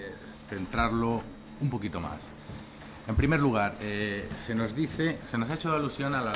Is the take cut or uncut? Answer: cut